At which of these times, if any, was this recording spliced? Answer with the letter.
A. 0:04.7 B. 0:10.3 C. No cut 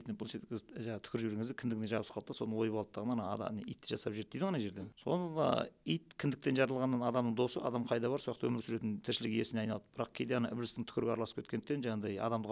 A